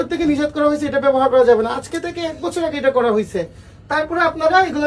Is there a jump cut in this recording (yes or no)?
no